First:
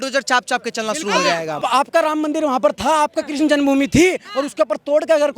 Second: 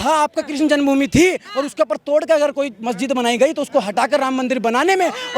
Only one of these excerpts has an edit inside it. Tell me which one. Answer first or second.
first